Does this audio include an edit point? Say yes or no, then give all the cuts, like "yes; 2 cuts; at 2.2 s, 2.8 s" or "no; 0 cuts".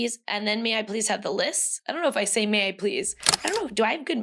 yes; 1 cut; at 1.8 s